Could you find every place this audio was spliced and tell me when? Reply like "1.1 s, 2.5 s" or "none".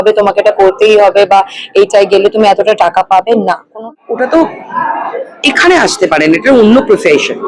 3.9 s